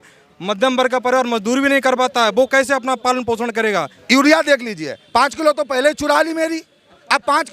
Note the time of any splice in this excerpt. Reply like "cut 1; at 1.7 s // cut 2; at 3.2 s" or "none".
cut 1; at 4.0 s